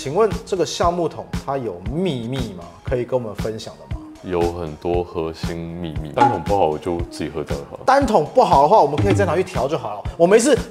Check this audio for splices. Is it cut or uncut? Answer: cut